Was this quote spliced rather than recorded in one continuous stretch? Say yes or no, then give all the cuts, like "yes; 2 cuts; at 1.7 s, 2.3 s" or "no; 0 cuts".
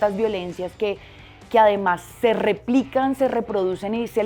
no; 0 cuts